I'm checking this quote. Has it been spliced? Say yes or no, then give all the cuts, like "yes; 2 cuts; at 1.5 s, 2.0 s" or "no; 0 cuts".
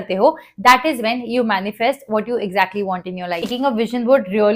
yes; 1 cut; at 3.5 s